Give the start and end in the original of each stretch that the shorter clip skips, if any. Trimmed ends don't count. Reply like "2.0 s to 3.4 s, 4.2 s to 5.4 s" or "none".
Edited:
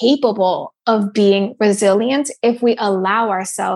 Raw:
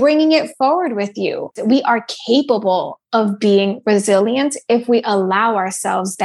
none